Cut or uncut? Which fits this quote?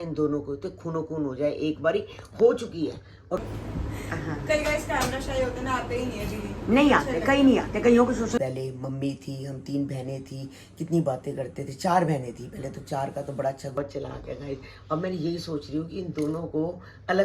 cut